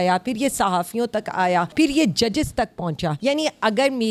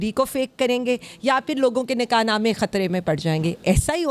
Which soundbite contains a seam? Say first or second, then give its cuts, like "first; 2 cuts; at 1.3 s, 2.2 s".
first; 2 cuts; at 1.7 s, 3.2 s